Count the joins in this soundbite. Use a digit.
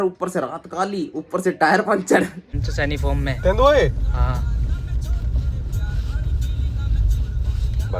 1